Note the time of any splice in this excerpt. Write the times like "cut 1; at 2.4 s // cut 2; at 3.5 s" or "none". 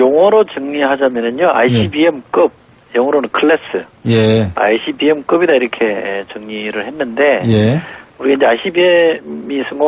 cut 1; at 6.4 s